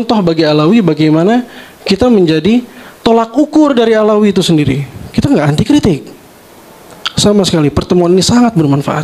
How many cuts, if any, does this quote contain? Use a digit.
0